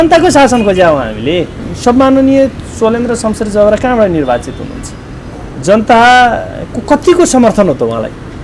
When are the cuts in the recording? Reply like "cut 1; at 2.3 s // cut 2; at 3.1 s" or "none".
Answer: cut 1; at 1.6 s